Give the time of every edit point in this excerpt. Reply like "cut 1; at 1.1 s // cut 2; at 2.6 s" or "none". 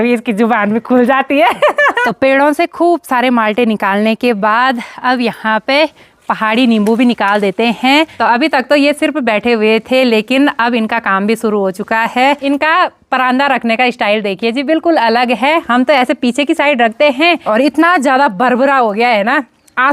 cut 1; at 2.0 s // cut 2; at 8.1 s // cut 3; at 12.4 s // cut 4; at 17.4 s